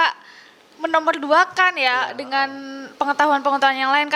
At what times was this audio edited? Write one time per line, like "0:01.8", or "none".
none

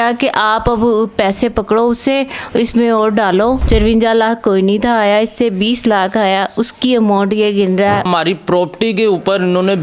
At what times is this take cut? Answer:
0:03.6
0:08.1

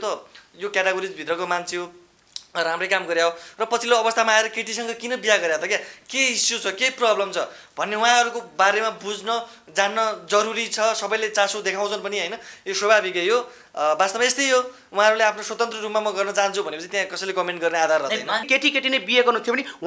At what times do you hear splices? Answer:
0:18.5

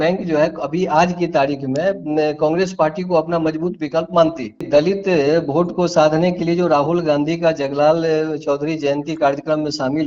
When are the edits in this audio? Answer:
0:04.6

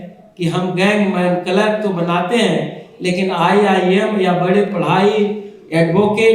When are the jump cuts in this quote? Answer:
none

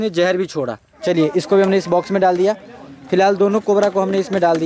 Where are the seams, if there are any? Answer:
0:00.9

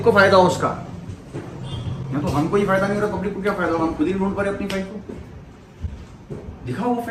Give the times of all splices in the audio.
none

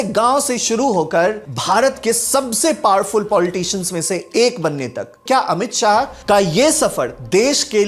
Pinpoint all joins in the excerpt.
0:05.2

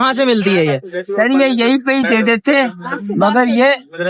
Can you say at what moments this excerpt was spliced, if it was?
none

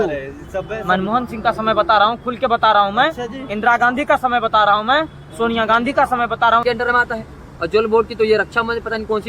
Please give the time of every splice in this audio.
0:06.6

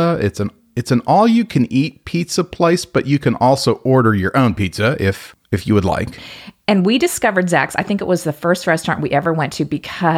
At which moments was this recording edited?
0:06.2

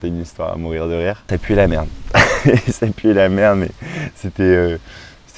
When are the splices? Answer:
0:01.3

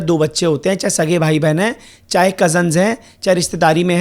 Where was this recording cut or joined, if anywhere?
none

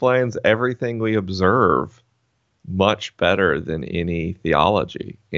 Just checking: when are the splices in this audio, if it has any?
none

